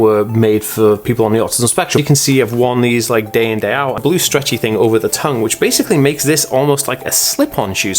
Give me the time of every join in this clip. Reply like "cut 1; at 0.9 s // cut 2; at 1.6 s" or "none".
cut 1; at 2.0 s // cut 2; at 4.0 s